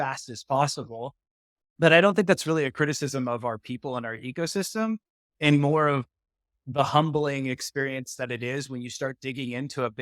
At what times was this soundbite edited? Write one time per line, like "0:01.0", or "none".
none